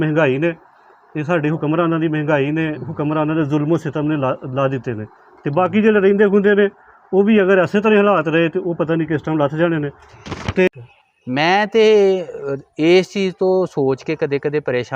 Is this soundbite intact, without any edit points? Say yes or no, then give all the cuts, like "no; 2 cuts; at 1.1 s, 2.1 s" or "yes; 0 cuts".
no; 1 cut; at 10.7 s